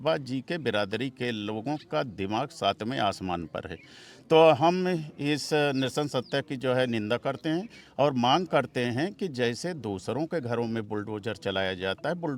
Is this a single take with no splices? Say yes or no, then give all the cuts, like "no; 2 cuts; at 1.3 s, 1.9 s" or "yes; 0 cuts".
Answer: yes; 0 cuts